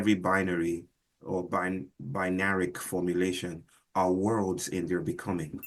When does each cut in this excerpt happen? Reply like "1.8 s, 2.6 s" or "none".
1.1 s